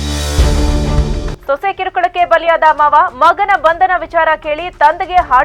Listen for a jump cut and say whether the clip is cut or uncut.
uncut